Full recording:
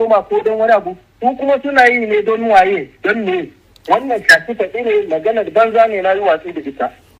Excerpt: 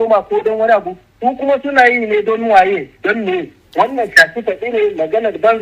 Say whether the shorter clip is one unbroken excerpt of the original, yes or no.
no